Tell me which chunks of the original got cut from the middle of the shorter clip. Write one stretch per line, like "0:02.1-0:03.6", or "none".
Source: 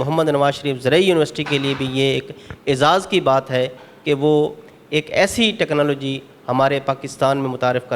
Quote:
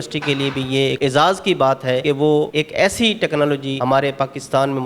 0:02.2-0:02.6
0:03.9-0:04.6
0:06.1-0:06.4